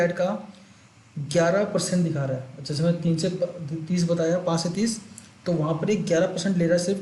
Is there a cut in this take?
no; 0 cuts

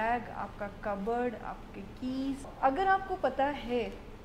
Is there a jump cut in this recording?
yes; 1 cut; at 2.5 s

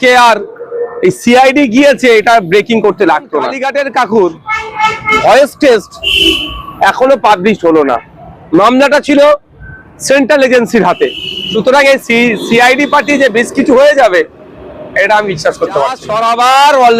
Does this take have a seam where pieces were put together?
yes; 3 cuts; at 3.6 s, 11.4 s, 16.1 s

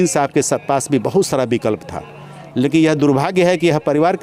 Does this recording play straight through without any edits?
yes; 0 cuts

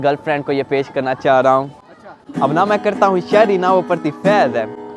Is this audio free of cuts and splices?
yes; 0 cuts

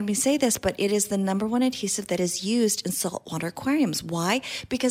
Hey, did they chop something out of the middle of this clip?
no; 0 cuts

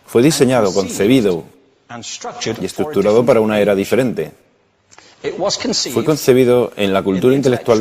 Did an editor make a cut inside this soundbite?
yes; 1 cut; at 1.1 s

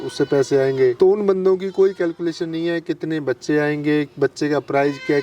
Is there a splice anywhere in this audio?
yes; 1 cut; at 0.9 s

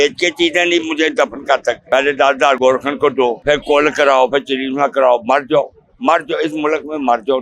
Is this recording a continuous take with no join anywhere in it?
no; 3 cuts; at 1.8 s, 2.6 s, 3.4 s

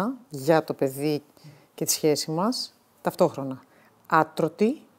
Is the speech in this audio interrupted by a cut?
no; 0 cuts

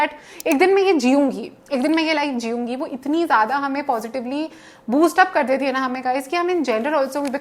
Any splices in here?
no; 0 cuts

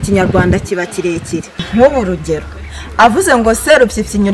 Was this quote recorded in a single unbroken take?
no; 1 cut; at 1.6 s

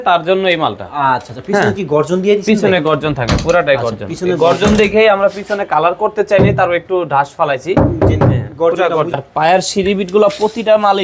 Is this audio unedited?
no; 1 cut; at 9.2 s

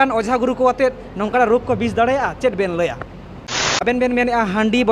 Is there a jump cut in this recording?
yes; 1 cut; at 3.8 s

